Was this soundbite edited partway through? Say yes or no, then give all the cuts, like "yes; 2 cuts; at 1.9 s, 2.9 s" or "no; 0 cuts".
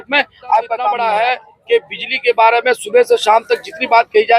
yes; 1 cut; at 1.0 s